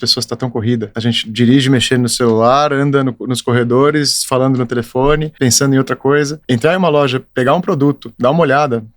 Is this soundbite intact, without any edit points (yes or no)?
no